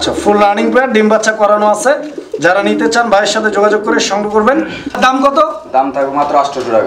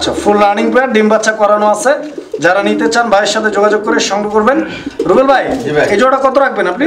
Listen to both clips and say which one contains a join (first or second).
first